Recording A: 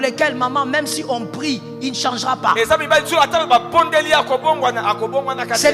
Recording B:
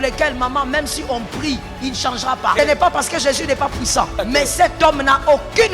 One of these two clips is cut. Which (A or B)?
B